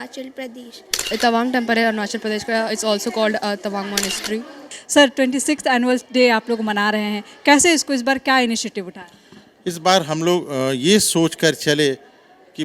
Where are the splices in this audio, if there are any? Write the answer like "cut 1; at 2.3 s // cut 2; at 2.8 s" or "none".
cut 1; at 1.0 s // cut 2; at 4.8 s